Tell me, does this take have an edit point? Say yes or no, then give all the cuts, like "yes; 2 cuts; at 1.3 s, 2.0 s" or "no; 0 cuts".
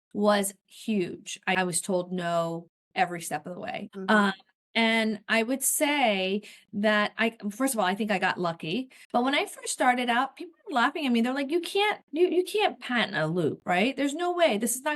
yes; 3 cuts; at 1.5 s, 3.8 s, 8.9 s